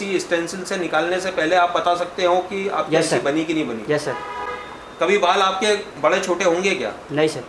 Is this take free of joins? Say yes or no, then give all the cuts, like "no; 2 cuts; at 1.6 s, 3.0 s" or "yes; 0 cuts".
yes; 0 cuts